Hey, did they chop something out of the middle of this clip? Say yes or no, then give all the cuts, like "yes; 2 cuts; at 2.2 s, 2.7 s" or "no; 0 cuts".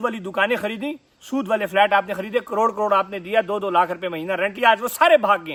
no; 0 cuts